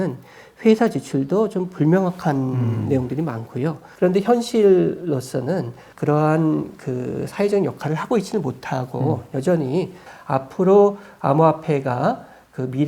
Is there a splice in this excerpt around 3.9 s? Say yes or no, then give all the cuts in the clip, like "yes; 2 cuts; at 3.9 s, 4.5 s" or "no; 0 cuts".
yes; 2 cuts; at 3.9 s, 10.0 s